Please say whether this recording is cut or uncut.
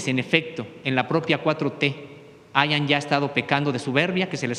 uncut